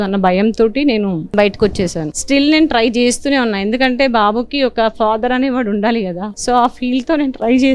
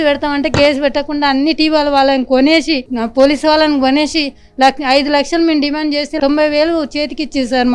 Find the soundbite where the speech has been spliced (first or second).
first